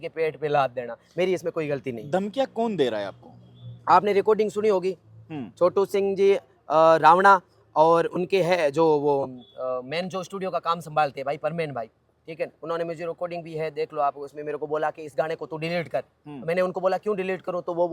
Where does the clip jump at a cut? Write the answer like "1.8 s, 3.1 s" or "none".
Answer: none